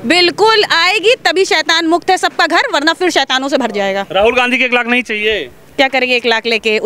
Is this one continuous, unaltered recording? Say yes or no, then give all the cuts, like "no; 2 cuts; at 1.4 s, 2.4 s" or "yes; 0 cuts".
yes; 0 cuts